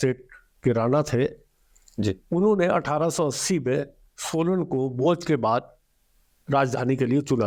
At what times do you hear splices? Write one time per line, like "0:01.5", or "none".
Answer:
none